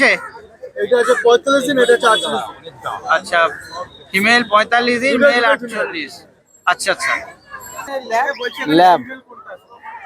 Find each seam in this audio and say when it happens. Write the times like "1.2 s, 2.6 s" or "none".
7.9 s